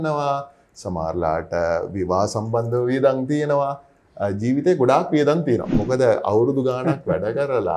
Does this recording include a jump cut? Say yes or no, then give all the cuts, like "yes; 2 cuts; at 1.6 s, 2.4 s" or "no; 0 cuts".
yes; 1 cut; at 5.7 s